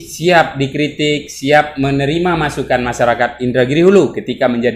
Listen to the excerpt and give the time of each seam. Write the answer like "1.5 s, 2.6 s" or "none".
none